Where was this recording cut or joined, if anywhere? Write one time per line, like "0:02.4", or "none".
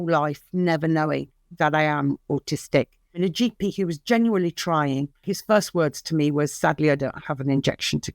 0:03.2
0:05.3